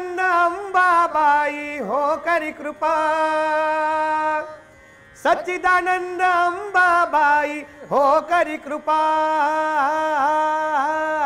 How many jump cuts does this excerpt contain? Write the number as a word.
zero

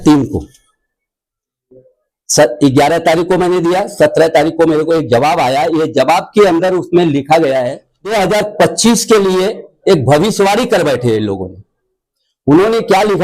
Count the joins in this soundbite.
one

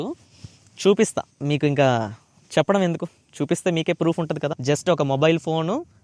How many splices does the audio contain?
one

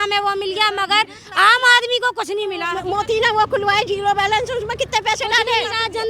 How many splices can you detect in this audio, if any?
one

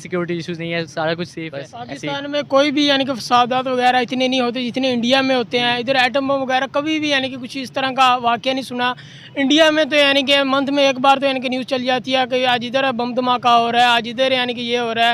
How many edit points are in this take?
one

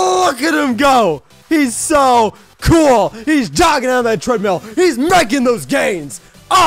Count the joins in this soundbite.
zero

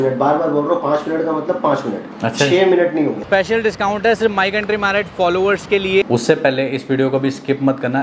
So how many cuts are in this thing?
two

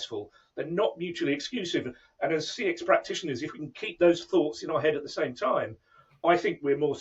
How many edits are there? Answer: zero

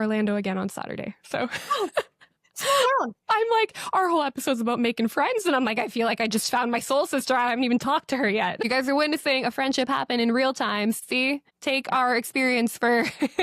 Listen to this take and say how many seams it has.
two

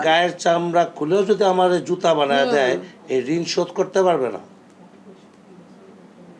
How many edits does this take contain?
zero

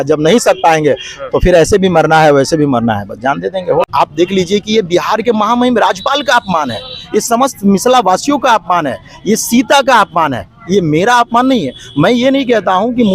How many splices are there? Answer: one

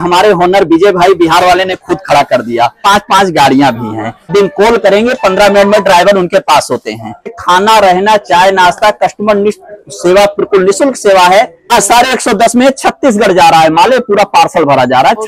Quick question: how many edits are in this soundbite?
four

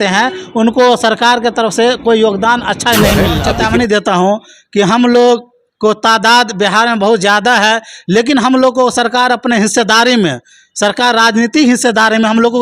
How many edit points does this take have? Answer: one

